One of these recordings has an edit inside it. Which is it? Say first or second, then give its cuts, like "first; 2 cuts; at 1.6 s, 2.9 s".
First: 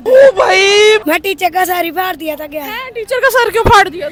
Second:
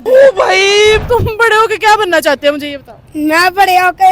second; 1 cut; at 1.0 s